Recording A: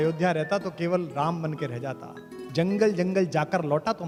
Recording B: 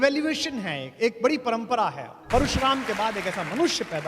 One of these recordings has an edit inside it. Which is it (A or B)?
B